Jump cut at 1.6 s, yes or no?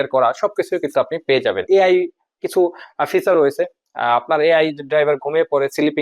yes